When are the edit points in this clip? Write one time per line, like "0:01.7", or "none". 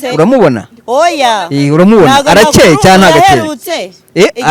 none